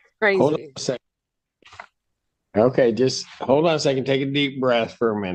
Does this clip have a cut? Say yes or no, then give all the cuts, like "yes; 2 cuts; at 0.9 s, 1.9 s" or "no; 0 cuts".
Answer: no; 0 cuts